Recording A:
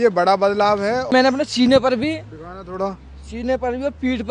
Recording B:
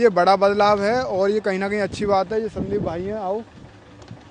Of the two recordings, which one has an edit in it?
A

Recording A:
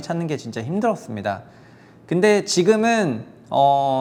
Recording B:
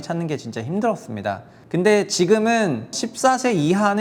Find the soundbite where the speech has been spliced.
B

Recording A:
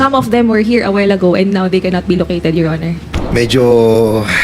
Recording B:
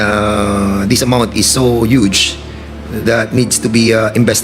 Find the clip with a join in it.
A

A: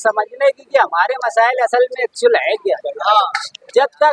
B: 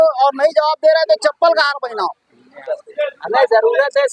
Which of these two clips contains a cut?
B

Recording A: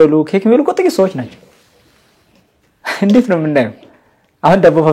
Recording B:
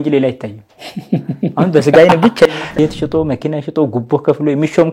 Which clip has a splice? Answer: B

